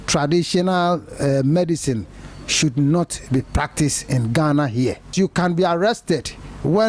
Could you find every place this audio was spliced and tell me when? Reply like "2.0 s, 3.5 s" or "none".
5.1 s